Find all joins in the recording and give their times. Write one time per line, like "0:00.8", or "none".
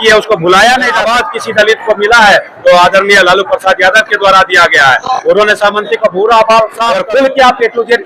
0:01.0
0:06.9